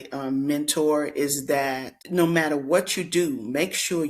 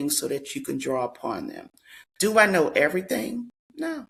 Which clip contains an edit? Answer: first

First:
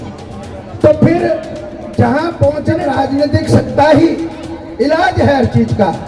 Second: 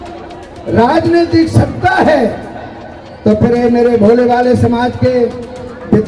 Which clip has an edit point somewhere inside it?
first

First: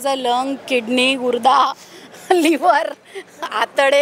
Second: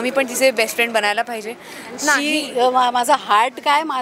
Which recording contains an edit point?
second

